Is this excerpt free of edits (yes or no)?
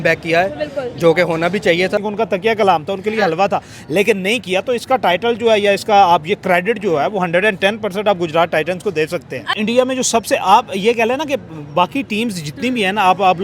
no